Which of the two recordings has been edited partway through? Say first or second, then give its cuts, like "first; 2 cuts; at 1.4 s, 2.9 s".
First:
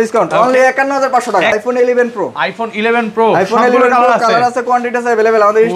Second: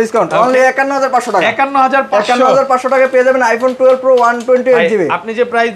first; 1 cut; at 1.5 s